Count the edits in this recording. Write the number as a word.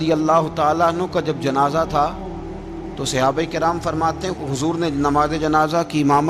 zero